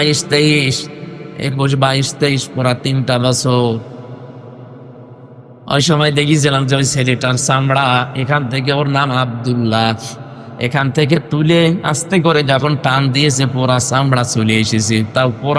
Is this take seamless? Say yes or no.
yes